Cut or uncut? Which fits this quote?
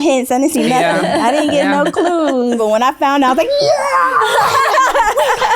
cut